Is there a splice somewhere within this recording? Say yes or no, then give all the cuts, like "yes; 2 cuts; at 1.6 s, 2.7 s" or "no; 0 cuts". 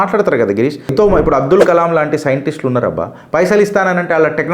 yes; 1 cut; at 1.0 s